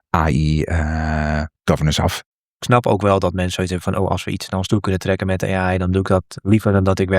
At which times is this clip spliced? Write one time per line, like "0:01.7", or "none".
0:02.3